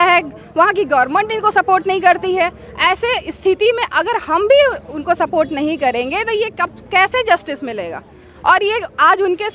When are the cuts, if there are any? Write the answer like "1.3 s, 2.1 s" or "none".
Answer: none